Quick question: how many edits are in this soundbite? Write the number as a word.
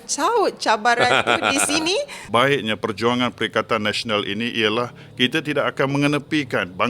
one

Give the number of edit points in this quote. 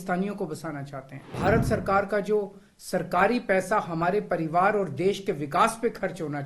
one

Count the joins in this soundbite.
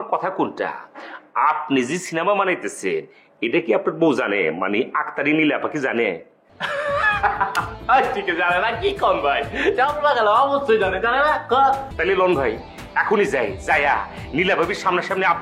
one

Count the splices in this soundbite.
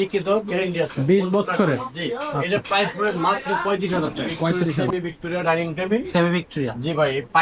one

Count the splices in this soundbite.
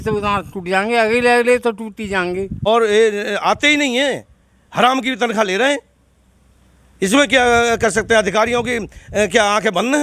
one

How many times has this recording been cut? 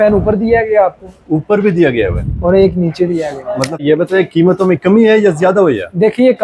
one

